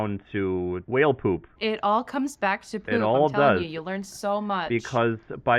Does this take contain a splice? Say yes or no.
no